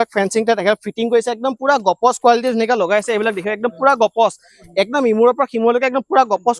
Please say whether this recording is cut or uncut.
uncut